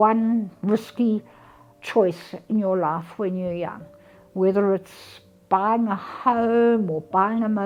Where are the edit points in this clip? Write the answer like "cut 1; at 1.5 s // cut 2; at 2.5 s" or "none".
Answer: none